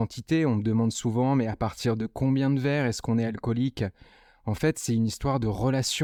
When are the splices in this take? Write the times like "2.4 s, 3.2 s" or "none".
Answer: none